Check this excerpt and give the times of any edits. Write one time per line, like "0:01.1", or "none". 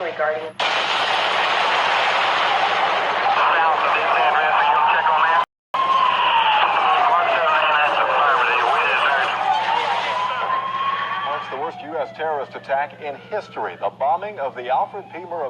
none